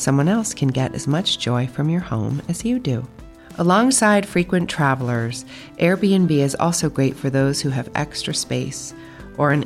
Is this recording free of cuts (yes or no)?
yes